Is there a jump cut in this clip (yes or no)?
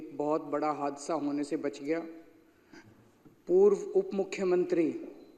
no